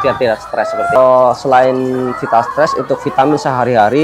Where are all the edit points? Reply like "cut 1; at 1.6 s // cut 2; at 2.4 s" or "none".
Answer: cut 1; at 1.0 s

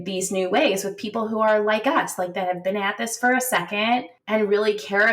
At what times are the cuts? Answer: cut 1; at 4.1 s

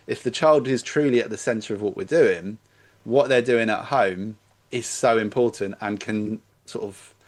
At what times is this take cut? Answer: none

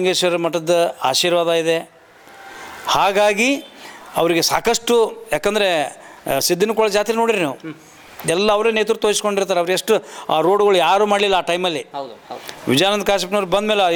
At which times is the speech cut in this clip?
none

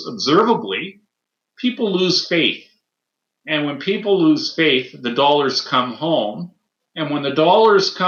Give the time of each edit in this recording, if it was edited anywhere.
none

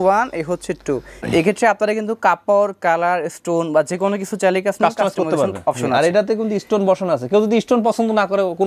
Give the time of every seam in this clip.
cut 1; at 1.2 s

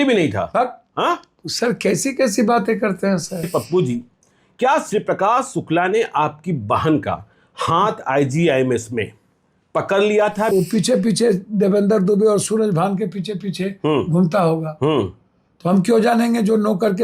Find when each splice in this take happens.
cut 1; at 3.5 s // cut 2; at 10.5 s

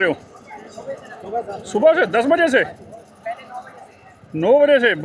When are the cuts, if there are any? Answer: none

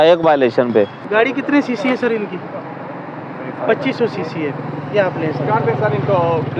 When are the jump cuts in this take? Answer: none

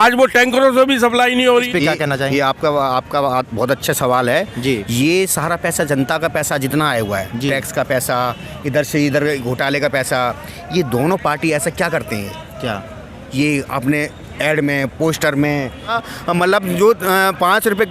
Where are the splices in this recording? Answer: cut 1; at 1.7 s // cut 2; at 15.9 s

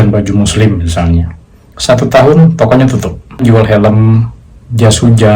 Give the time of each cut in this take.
cut 1; at 3.4 s

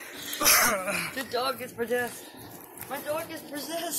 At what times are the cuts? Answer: none

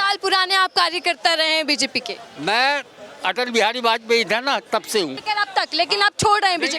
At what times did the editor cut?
cut 1; at 5.2 s

